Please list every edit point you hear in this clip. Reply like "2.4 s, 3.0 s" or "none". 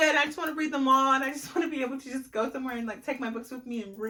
none